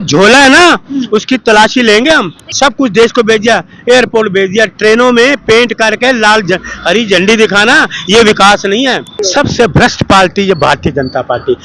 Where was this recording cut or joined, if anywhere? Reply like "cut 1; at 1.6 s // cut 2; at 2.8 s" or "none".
cut 1; at 2.4 s // cut 2; at 9.2 s

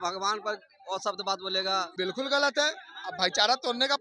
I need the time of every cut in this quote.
cut 1; at 1.9 s

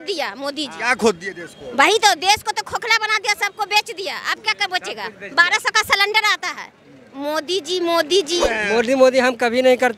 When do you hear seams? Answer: cut 1; at 8.5 s

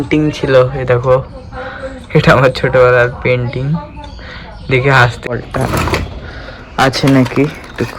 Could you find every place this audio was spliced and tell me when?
cut 1; at 5.3 s

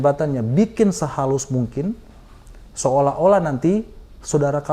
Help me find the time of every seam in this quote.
none

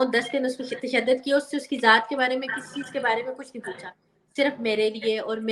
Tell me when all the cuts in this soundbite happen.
none

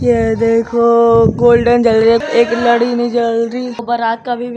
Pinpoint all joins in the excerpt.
cut 1; at 2.2 s // cut 2; at 3.8 s

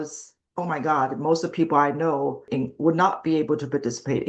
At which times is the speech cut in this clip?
cut 1; at 2.5 s

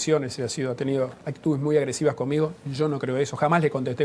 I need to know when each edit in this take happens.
cut 1; at 1.2 s

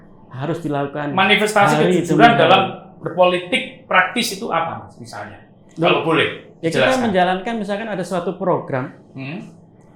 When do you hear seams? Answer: none

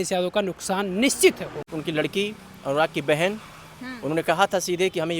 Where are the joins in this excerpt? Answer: cut 1; at 1.7 s

